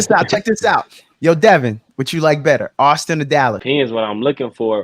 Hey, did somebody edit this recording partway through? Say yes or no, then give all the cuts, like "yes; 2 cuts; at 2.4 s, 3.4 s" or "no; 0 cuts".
yes; 1 cut; at 3.6 s